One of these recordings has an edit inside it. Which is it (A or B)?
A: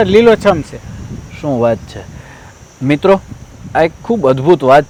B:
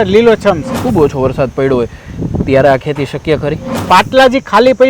B